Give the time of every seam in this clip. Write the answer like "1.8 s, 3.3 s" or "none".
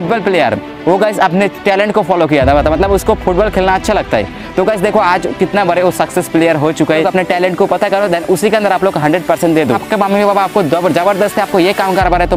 7.1 s, 9.8 s